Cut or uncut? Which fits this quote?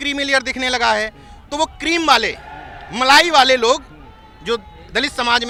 uncut